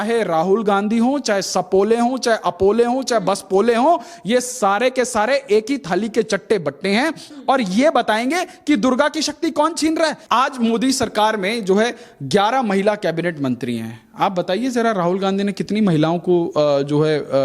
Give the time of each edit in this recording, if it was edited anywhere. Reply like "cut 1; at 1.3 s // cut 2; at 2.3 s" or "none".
cut 1; at 7.3 s // cut 2; at 10.2 s

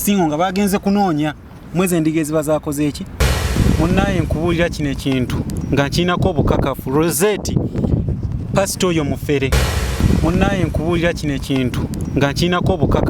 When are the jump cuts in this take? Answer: cut 1; at 3.4 s // cut 2; at 9.7 s

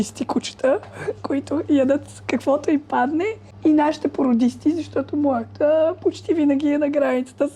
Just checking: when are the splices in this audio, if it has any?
cut 1; at 3.4 s

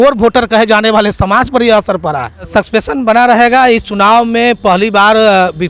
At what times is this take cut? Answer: cut 1; at 2.5 s

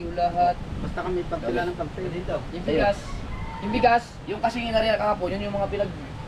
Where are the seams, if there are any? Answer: none

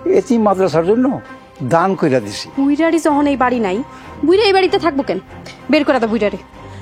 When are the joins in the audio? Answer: cut 1; at 2.4 s

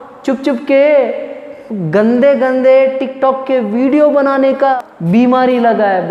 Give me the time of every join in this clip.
cut 1; at 4.8 s

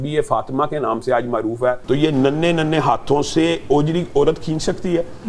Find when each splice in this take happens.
cut 1; at 1.8 s

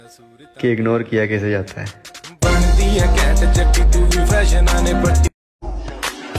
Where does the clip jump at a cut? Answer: cut 1; at 5.5 s

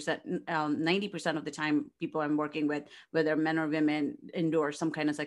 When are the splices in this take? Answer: none

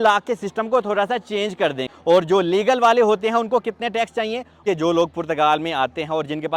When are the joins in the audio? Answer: cut 1; at 1.9 s // cut 2; at 4.6 s

